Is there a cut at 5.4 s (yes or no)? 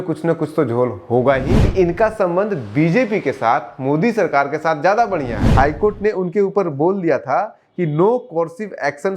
yes